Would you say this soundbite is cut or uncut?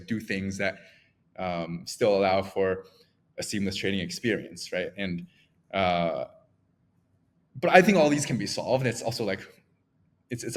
uncut